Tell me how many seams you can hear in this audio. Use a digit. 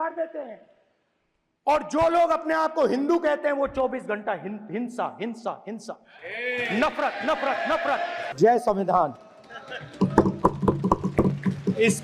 1